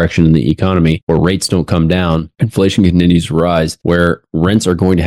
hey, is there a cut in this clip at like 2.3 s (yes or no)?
yes